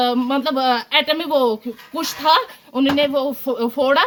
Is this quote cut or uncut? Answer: uncut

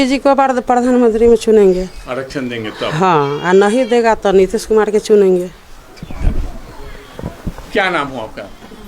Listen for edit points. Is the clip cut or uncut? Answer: uncut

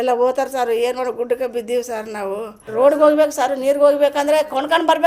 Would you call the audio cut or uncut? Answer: cut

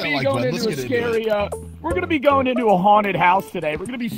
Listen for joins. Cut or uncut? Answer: uncut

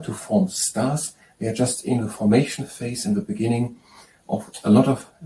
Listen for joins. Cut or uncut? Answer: uncut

